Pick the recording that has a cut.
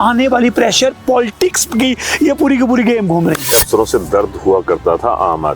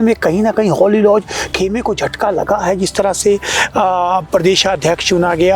first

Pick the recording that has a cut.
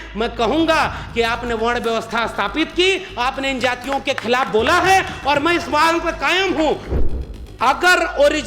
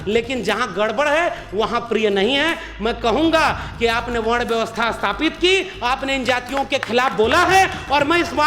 first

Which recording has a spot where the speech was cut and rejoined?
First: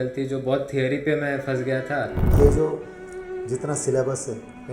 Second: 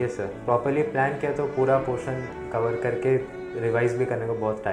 first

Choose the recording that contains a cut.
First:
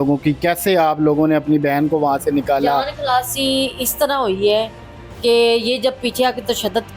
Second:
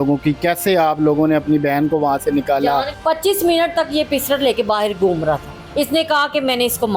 second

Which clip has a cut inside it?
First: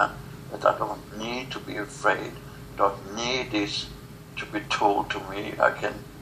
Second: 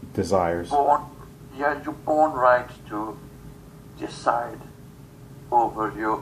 first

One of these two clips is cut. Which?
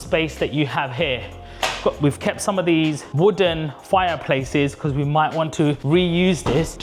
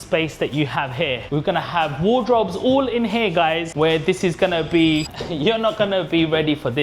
second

